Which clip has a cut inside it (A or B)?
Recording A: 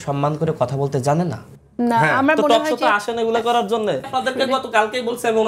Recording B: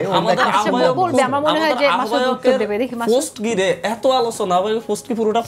A